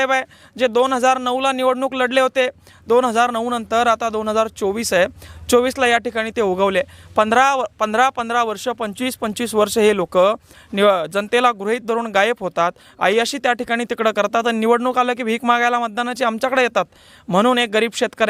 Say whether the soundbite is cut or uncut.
uncut